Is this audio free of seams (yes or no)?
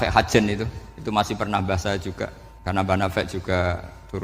no